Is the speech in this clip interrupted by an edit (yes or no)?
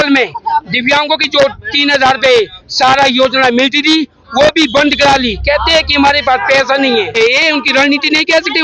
yes